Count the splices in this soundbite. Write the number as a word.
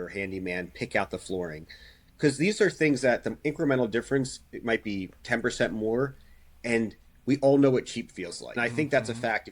one